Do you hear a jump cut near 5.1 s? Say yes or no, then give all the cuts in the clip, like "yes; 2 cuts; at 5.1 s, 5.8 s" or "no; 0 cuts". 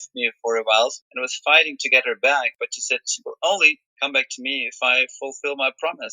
no; 2 cuts; at 1.0 s, 2.6 s